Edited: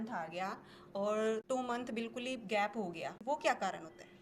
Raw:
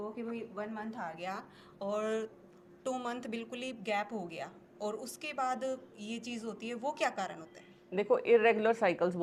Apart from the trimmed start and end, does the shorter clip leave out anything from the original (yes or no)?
yes